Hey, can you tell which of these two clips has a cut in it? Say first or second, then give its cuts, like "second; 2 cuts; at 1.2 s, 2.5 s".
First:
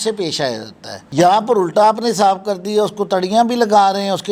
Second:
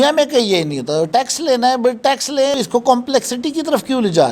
second; 1 cut; at 2.5 s